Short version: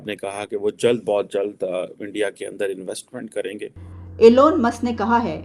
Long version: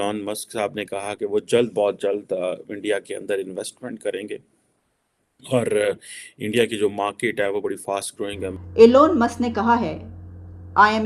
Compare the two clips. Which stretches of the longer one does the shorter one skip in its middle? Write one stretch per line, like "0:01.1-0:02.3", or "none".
0:04.7-0:08.6